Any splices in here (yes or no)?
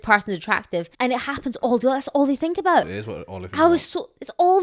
yes